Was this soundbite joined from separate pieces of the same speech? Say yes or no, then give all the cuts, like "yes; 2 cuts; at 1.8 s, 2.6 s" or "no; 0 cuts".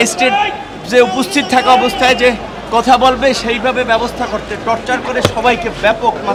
no; 0 cuts